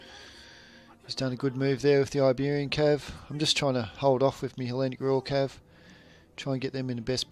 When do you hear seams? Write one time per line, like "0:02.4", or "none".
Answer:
none